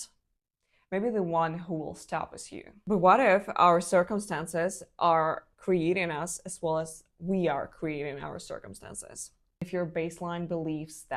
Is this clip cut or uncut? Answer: cut